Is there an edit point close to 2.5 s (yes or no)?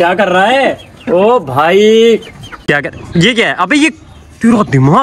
yes